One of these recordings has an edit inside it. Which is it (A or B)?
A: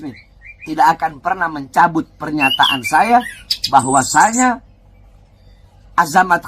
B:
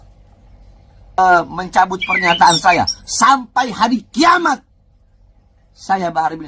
B